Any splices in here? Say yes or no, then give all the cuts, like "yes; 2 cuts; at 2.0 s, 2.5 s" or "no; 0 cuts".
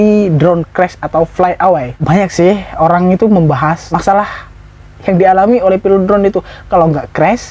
no; 0 cuts